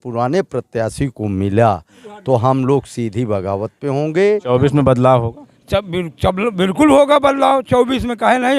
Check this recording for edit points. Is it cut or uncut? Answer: cut